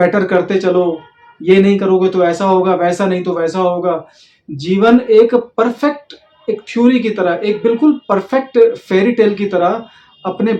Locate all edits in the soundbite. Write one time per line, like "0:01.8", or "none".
none